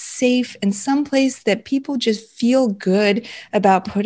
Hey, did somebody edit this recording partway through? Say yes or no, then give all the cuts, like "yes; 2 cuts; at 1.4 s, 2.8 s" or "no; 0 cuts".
no; 0 cuts